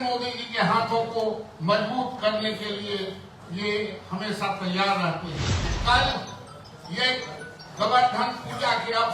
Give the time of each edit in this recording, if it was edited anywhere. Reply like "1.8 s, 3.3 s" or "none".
5.6 s